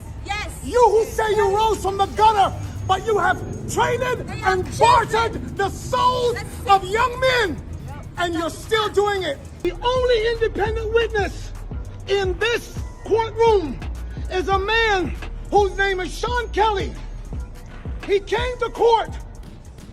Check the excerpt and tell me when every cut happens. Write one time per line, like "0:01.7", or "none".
0:09.4